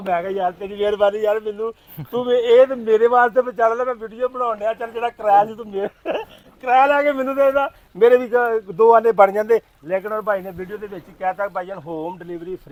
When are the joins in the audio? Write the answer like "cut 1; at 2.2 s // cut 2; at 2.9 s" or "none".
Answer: none